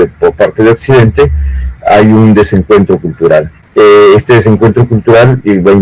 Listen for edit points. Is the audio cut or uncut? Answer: cut